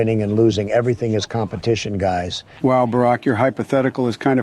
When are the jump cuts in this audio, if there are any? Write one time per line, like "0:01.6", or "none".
0:02.4